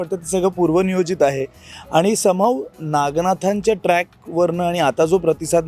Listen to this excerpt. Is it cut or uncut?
uncut